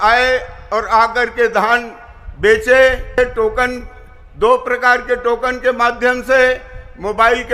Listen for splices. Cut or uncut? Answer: cut